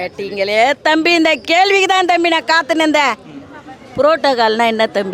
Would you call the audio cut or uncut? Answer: uncut